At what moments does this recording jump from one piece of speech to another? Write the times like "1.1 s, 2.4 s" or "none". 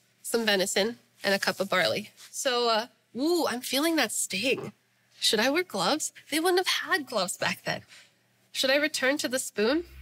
none